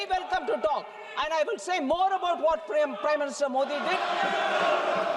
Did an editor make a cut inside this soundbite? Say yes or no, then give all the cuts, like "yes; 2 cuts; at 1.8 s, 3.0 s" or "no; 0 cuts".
yes; 1 cut; at 4.0 s